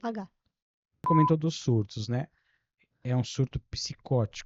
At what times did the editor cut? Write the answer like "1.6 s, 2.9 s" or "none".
0.9 s